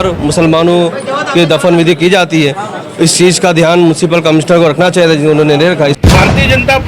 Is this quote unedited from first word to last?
no; 1 cut; at 6.0 s

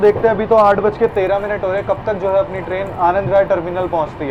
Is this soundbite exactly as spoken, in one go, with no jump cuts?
yes; 0 cuts

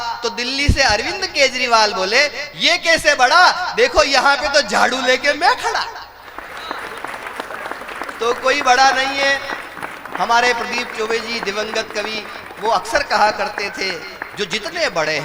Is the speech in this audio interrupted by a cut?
no; 0 cuts

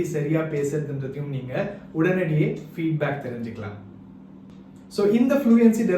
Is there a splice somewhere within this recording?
yes; 1 cut; at 4.5 s

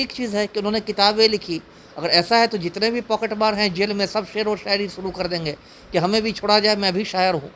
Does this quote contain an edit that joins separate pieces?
no; 0 cuts

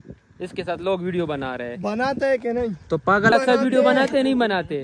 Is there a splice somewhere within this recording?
yes; 1 cut; at 3.3 s

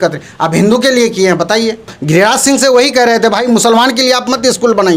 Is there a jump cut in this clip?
yes; 1 cut; at 1.9 s

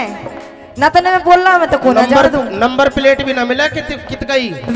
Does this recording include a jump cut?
no; 0 cuts

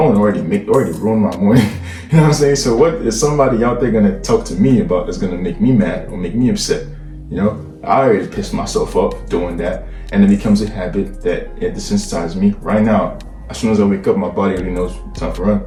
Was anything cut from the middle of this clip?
no; 0 cuts

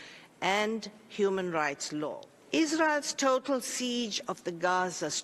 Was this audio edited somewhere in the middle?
yes; 1 cut; at 2.3 s

